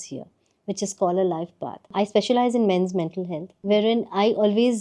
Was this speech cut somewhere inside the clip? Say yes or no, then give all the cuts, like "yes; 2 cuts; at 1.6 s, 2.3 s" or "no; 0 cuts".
yes; 2 cuts; at 1.9 s, 3.5 s